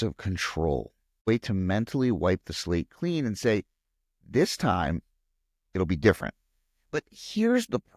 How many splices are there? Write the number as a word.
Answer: one